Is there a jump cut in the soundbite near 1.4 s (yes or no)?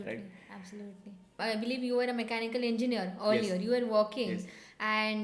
yes